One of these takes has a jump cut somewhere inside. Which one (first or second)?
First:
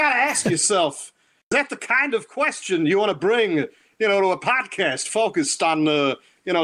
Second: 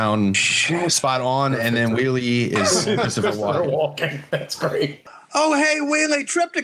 second